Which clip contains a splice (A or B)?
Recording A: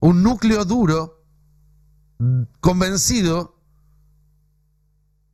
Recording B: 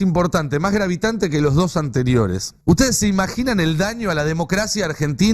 B